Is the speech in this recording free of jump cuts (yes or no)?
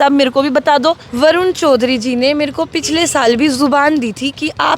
no